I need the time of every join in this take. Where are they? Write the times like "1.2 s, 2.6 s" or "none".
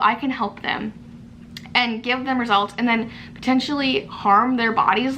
none